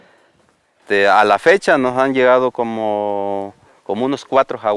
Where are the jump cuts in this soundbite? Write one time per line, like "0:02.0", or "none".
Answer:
0:02.5